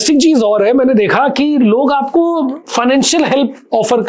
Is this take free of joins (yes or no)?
yes